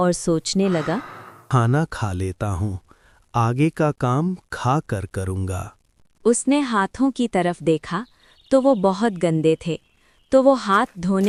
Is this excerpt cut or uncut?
uncut